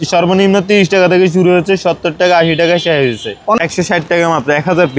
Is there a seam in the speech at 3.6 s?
yes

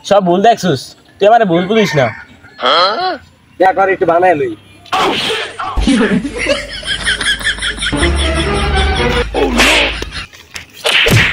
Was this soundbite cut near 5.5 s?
no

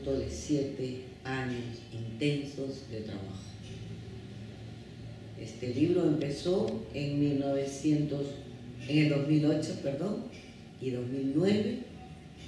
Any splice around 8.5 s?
no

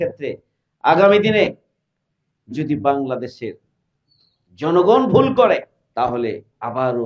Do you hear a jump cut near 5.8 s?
yes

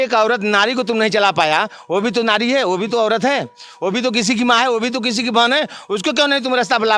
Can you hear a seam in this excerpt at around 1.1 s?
no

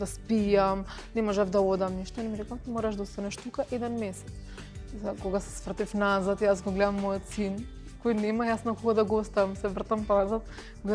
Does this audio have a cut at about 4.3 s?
no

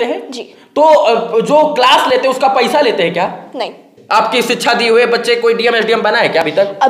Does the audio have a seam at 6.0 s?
no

